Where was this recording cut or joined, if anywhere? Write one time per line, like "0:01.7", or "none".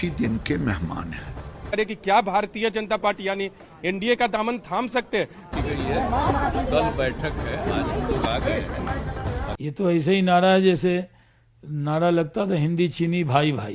0:01.7
0:05.5
0:09.5